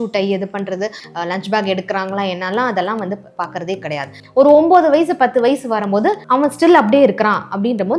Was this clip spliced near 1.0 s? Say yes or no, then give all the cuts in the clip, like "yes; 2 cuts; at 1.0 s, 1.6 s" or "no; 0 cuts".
yes; 3 cuts; at 1.0 s, 4.2 s, 6.2 s